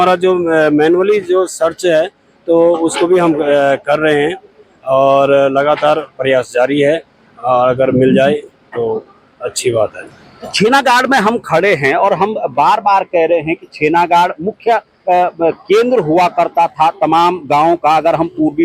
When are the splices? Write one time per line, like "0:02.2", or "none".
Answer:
none

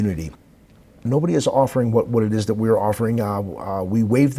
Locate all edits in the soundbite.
0:01.0

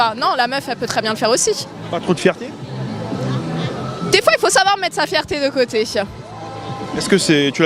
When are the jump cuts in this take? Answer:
none

